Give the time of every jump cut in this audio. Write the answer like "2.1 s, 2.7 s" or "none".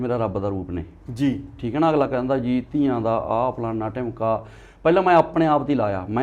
none